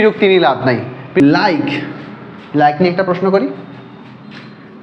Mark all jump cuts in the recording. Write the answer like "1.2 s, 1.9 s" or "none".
1.2 s